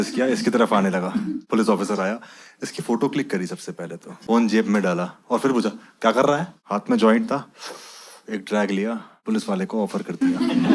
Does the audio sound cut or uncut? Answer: cut